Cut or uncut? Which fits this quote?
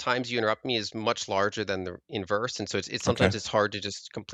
uncut